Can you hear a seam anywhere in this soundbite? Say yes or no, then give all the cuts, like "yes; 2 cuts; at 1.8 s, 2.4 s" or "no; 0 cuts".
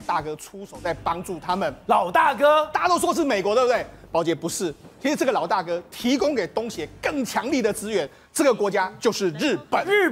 no; 0 cuts